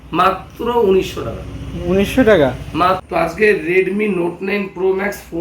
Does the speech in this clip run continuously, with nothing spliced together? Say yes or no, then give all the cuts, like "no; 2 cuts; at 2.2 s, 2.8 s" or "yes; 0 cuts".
no; 1 cut; at 3.0 s